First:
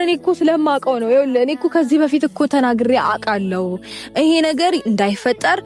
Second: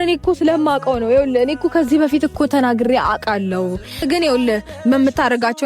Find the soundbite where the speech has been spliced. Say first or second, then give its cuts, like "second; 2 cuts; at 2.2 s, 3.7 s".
second; 1 cut; at 4.0 s